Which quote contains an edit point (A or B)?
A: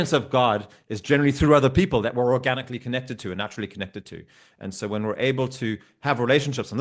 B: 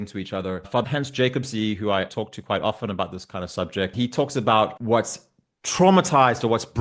B